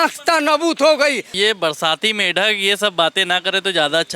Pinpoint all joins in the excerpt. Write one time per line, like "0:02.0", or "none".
0:01.3